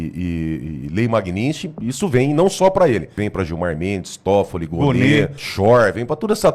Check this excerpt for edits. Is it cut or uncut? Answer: cut